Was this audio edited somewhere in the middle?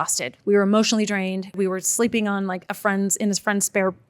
yes; 1 cut; at 1.6 s

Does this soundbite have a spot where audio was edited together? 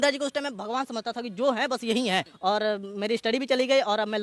yes; 1 cut; at 2.3 s

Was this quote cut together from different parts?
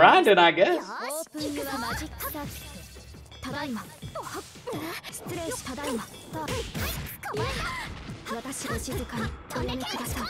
no; 0 cuts

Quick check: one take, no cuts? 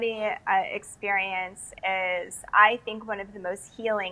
yes; 0 cuts

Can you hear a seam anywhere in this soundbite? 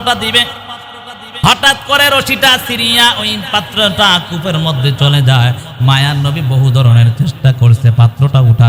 no; 0 cuts

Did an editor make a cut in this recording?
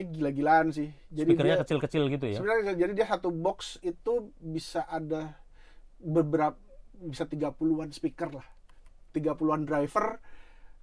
no; 0 cuts

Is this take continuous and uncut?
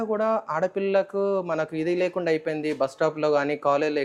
yes; 0 cuts

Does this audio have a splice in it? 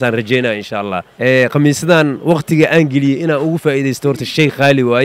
no; 0 cuts

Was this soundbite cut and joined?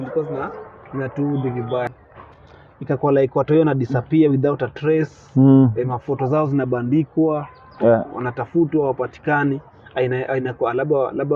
yes; 1 cut; at 1.9 s

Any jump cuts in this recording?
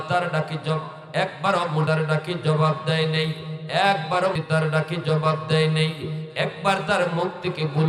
yes; 2 cuts; at 1.9 s, 4.4 s

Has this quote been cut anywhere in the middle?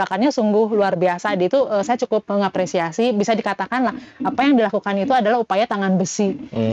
no; 0 cuts

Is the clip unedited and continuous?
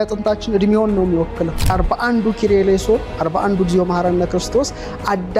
no; 1 cut; at 1.7 s

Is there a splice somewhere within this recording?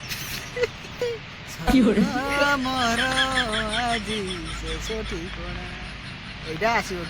yes; 1 cut; at 1.0 s

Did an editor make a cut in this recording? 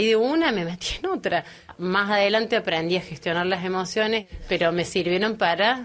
yes; 2 cuts; at 1.7 s, 4.2 s

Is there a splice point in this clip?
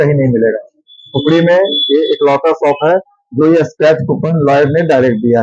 no; 0 cuts

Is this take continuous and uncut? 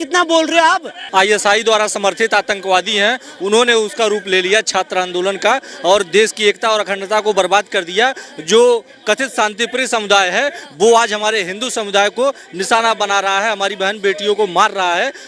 no; 1 cut; at 0.9 s

